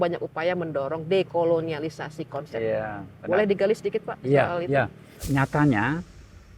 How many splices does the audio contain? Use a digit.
1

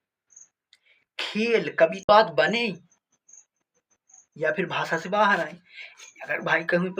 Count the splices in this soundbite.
1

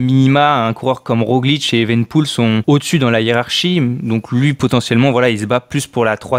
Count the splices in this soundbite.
1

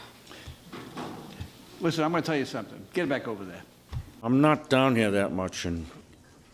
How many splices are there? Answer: 1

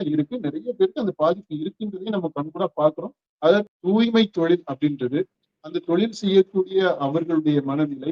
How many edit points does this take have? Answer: 1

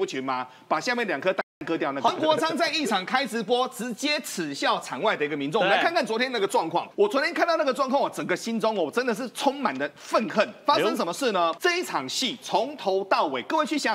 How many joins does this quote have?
3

